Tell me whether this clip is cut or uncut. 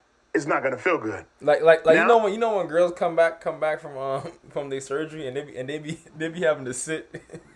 uncut